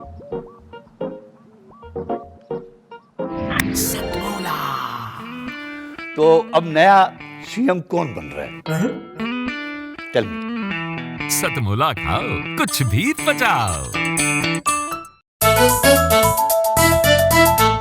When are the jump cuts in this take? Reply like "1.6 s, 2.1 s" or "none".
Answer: 15.2 s